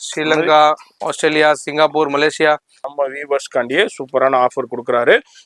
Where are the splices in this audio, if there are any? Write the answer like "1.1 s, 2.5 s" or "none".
2.8 s